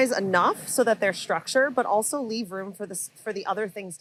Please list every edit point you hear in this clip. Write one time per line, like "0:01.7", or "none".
none